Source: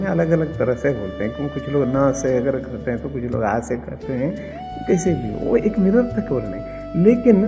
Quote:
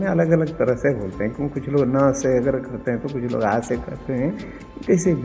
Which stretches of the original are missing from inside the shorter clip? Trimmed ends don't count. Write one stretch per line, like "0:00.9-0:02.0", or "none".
none

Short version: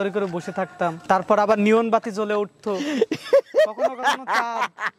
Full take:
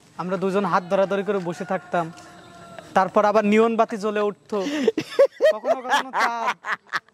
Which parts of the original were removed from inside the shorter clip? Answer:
0:02.1-0:02.8

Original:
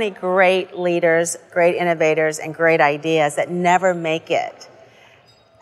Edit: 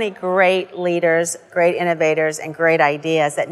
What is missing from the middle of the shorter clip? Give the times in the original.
none

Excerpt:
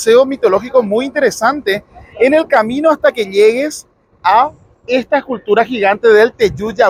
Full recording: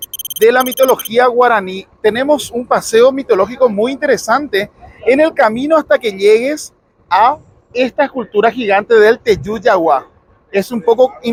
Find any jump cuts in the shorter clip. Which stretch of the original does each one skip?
none

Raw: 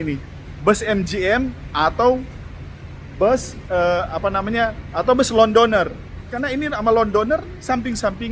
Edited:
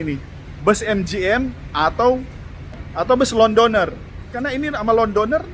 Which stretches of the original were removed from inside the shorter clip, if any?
0:02.8-0:04.8

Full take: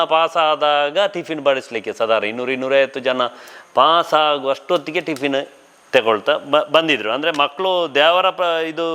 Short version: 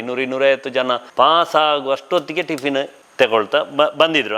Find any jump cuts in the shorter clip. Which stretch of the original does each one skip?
0:03.3-0:03.6
0:05.6-0:05.7

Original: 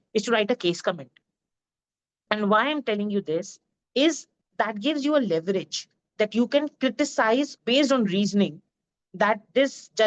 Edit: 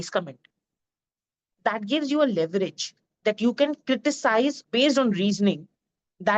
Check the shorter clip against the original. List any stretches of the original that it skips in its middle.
0:02.1-0:04.3

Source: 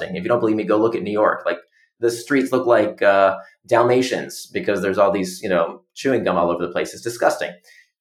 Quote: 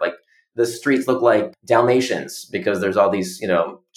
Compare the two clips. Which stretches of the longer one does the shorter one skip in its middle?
0:02.9-0:03.5

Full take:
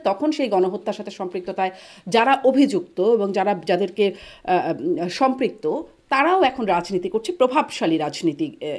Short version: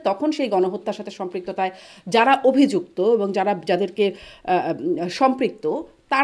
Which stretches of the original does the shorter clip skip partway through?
none

